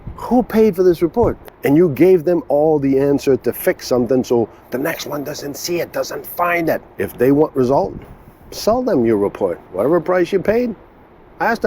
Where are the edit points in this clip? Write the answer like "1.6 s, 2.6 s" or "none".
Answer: 1.4 s, 6.9 s